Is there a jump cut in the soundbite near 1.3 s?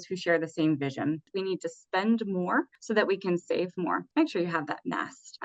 yes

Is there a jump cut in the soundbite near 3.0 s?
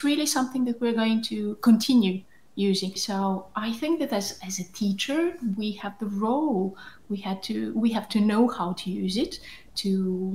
yes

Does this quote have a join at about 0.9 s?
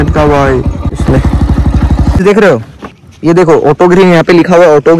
yes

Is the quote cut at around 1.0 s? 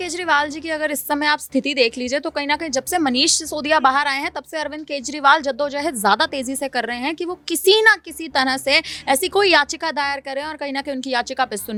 no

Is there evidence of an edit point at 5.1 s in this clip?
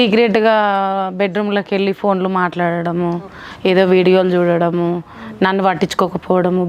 no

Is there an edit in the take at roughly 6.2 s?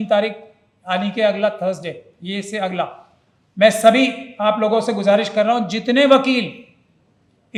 no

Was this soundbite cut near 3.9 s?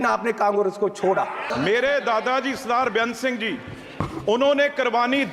no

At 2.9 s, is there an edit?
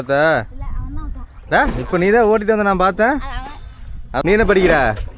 no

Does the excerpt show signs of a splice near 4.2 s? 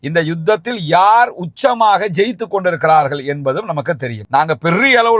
yes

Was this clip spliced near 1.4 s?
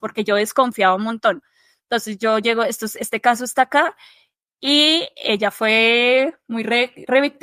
no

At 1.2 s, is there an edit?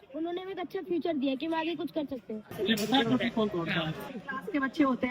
no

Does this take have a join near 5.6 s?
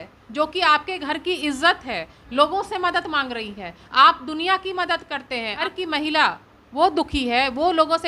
yes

